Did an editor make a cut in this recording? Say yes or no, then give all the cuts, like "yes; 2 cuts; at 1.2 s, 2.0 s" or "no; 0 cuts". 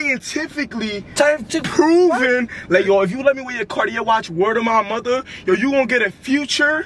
no; 0 cuts